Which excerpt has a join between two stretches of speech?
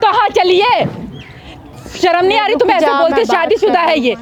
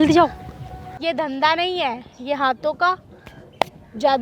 second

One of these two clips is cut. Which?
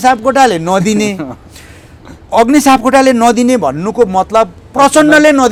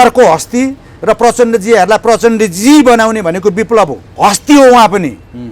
second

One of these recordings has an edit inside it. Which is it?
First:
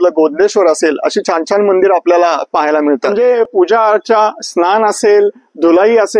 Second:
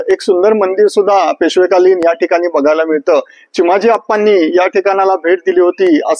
first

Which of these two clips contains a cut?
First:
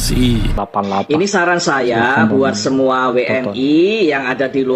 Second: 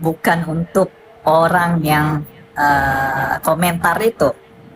first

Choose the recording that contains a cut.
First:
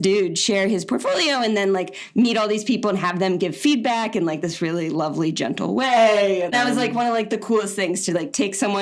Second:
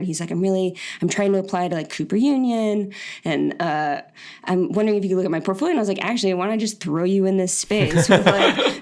first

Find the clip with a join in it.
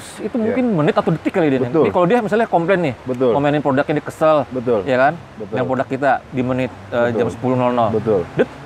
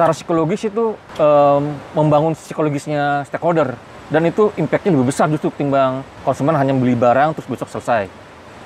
second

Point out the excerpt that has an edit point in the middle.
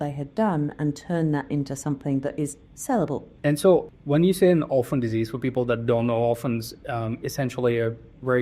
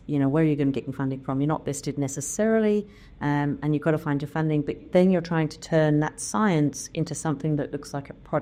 first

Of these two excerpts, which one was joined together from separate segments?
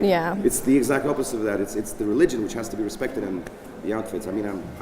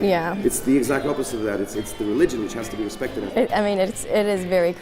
second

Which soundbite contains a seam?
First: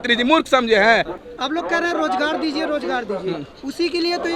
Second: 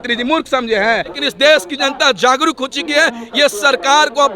second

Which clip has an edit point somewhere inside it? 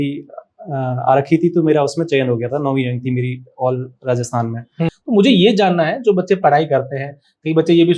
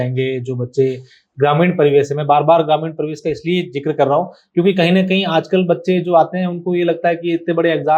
first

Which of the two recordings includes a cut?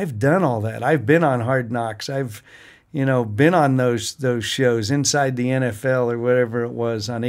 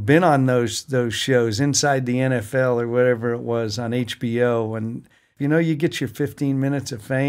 second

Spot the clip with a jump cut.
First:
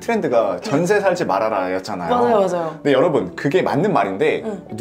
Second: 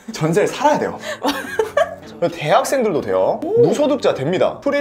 second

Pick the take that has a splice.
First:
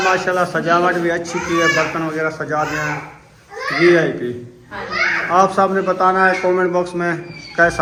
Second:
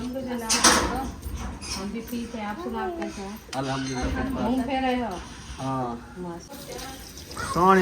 second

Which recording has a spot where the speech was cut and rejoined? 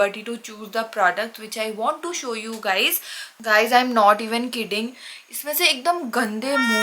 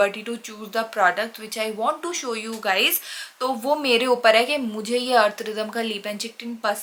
first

